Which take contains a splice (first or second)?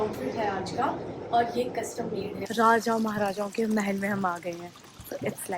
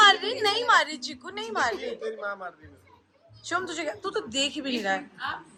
first